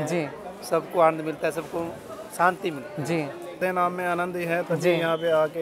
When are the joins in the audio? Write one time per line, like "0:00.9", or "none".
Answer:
0:03.6